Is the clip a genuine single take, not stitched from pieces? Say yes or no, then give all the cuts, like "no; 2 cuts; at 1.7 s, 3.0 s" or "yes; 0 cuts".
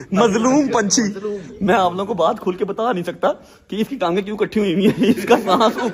yes; 0 cuts